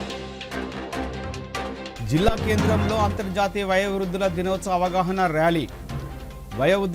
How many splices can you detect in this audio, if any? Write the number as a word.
zero